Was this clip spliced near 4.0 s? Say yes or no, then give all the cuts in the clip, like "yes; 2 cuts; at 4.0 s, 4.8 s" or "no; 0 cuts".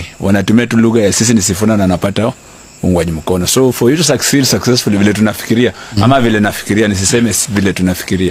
no; 0 cuts